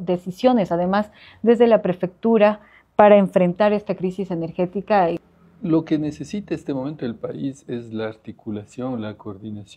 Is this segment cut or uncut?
cut